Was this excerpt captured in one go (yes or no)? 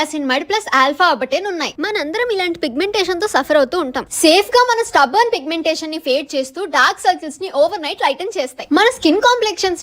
no